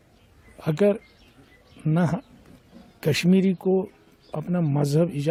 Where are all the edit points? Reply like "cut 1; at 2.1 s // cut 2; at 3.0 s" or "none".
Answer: none